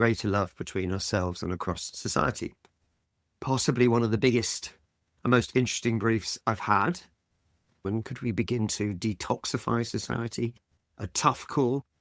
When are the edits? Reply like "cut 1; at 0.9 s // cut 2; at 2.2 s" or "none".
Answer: cut 1; at 7.8 s